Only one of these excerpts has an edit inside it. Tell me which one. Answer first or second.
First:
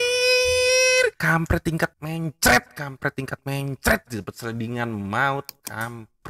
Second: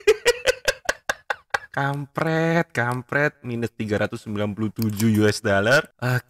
first